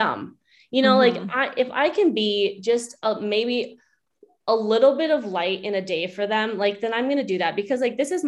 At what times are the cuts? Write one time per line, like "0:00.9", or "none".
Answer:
none